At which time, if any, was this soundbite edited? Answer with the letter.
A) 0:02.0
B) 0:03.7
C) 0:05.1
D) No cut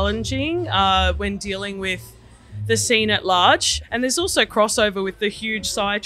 B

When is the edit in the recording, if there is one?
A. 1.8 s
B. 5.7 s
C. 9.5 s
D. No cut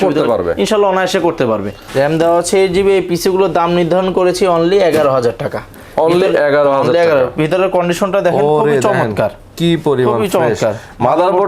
A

